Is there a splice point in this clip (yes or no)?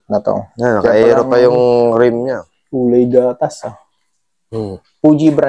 no